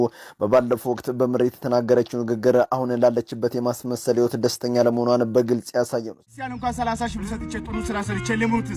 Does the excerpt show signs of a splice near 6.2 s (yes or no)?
yes